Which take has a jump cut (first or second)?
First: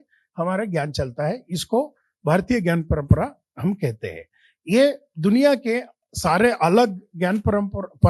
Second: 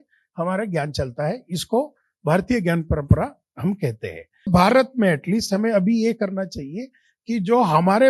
second